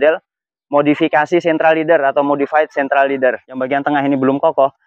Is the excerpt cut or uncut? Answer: cut